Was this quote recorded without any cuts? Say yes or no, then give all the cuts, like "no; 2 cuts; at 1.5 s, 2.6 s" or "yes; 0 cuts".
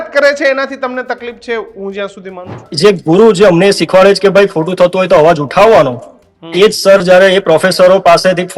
no; 1 cut; at 2.6 s